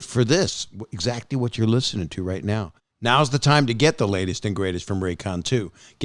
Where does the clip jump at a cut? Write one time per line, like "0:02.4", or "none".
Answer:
0:02.8